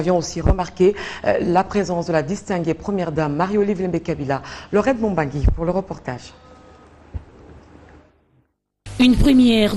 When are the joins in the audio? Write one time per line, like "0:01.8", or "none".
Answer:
0:07.0